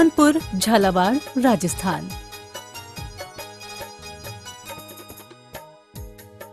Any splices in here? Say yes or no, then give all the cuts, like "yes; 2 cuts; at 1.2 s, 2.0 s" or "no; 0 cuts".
yes; 1 cut; at 2.1 s